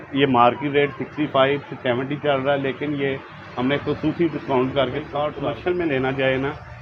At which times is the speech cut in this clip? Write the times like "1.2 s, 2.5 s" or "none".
5.5 s